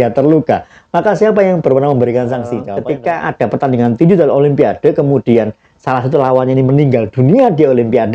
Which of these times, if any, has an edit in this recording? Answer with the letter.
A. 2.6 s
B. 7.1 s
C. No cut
A